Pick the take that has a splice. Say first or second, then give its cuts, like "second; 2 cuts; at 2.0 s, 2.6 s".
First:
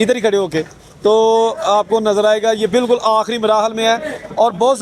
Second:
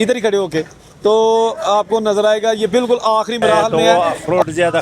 second; 1 cut; at 3.7 s